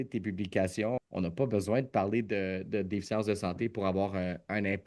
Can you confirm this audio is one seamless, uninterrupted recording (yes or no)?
no